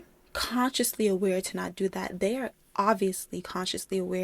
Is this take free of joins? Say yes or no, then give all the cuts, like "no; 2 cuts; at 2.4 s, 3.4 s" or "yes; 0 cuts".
yes; 0 cuts